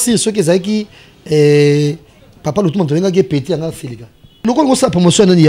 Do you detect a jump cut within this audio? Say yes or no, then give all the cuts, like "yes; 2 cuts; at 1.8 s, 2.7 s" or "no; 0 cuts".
yes; 1 cut; at 4.4 s